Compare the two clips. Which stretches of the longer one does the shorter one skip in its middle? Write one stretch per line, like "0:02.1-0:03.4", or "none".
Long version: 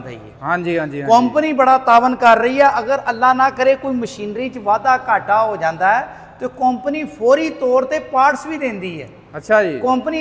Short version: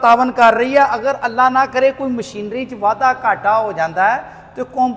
none